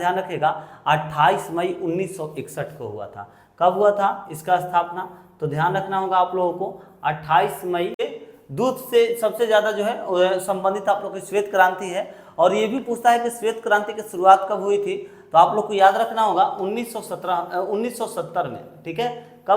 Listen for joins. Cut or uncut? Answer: cut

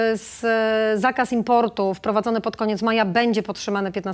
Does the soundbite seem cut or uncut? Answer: uncut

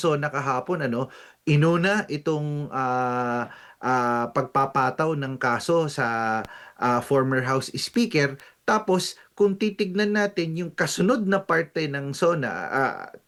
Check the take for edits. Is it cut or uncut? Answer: uncut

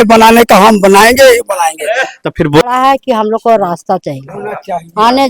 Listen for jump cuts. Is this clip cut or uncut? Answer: cut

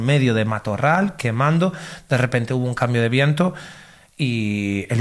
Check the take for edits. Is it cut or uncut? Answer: uncut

